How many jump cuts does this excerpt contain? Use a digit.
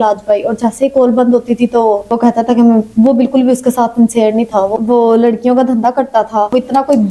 1